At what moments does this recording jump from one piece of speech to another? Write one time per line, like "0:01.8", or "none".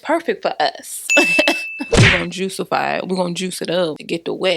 0:02.0